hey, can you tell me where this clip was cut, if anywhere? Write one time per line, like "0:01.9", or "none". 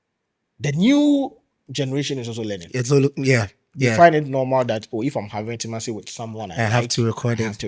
0:05.6